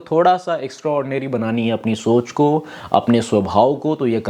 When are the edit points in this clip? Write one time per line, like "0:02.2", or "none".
none